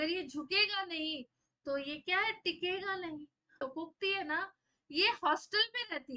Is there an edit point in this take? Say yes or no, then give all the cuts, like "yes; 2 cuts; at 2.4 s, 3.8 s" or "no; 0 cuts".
yes; 1 cut; at 3.6 s